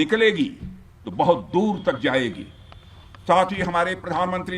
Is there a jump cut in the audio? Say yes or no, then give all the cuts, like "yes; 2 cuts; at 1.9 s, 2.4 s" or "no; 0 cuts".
no; 0 cuts